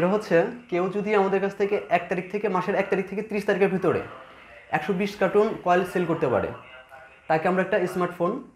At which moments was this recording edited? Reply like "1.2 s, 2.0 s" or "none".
none